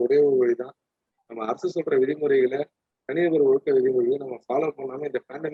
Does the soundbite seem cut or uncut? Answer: uncut